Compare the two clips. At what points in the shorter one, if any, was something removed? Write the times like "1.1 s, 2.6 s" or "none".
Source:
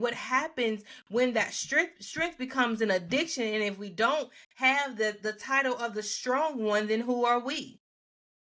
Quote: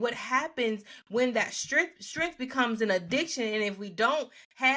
none